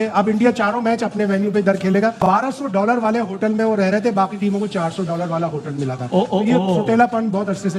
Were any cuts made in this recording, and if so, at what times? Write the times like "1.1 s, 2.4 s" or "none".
2.2 s

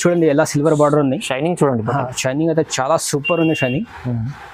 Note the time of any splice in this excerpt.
none

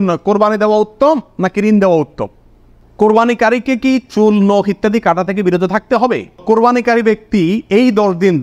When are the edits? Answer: 2.7 s, 6.3 s

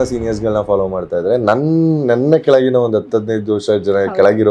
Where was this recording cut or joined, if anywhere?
none

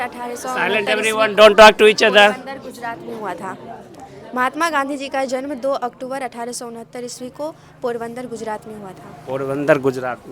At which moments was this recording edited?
none

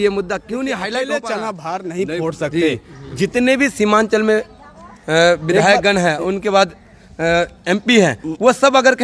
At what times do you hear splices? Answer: 1.1 s

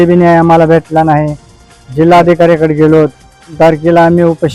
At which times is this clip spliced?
3.5 s

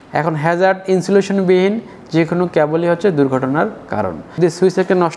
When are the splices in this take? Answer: 4.2 s

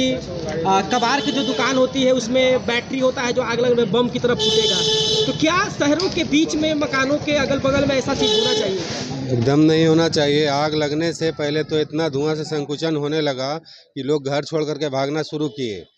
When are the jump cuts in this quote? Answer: none

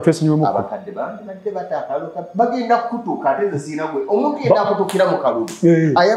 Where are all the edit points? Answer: none

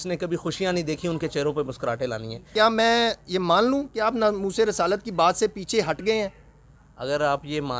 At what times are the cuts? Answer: 2.5 s

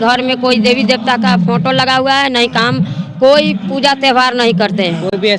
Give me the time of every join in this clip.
none

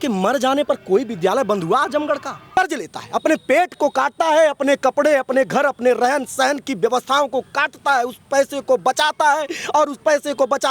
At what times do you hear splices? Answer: 2.6 s

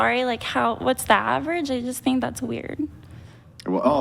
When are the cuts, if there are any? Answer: 1.6 s

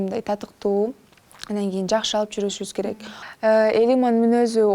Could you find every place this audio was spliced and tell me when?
3.2 s

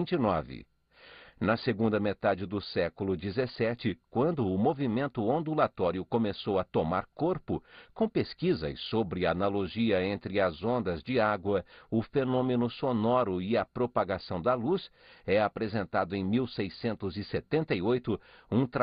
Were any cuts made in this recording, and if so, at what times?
6.5 s

